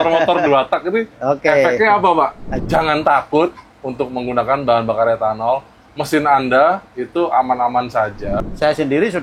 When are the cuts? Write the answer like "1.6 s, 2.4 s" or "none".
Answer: 2.5 s, 8.4 s